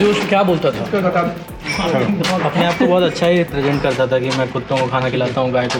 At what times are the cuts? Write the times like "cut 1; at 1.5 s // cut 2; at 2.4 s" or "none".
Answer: none